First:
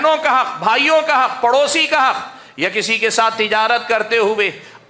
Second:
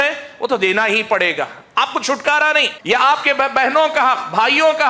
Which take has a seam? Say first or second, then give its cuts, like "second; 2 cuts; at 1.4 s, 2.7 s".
second; 1 cut; at 2.7 s